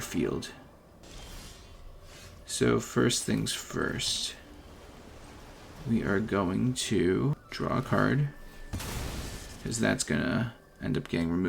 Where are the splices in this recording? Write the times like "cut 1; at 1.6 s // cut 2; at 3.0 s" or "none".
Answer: cut 1; at 1.1 s // cut 2; at 7.4 s